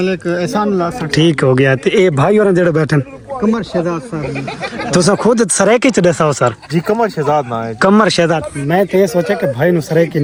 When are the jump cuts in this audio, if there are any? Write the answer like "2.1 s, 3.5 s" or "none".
none

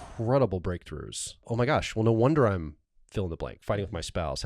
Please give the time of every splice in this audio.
1.5 s

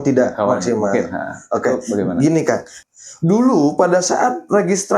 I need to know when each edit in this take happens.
2.7 s

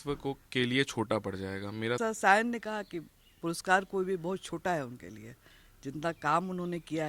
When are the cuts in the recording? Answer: 2.0 s

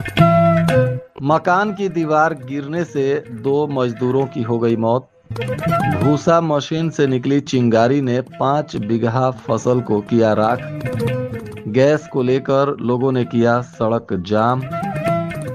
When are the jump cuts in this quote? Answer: 1.1 s

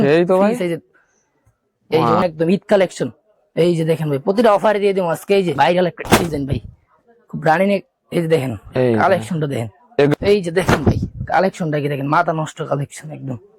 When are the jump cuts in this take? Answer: 2.2 s, 5.5 s, 10.1 s

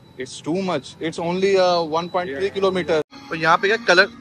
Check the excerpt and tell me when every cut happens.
3.2 s

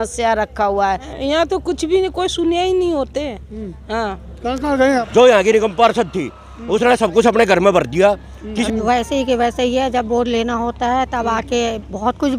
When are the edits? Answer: 1.1 s, 5.1 s, 8.7 s

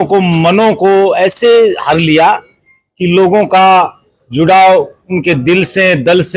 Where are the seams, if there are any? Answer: none

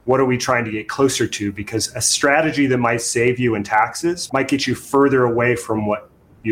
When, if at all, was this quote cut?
4.2 s

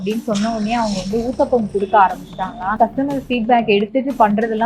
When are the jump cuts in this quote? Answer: 2.8 s

